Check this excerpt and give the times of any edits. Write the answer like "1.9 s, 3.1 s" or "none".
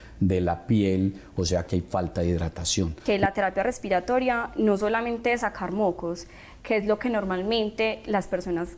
3.0 s